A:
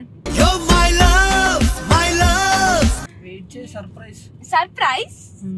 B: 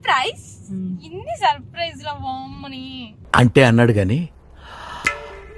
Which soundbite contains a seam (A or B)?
A